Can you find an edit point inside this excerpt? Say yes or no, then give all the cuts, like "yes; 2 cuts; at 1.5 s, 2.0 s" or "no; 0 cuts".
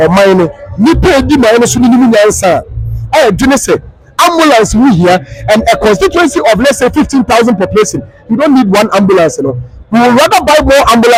no; 0 cuts